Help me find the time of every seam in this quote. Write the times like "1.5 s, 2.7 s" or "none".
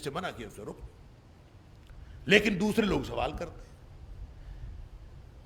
none

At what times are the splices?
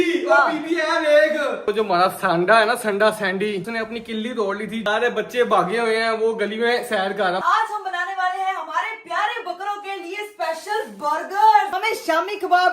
1.7 s, 3.7 s, 4.8 s, 7.4 s, 11.7 s

